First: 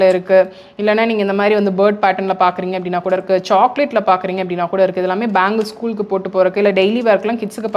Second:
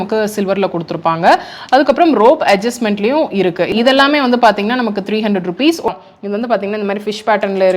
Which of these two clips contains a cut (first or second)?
second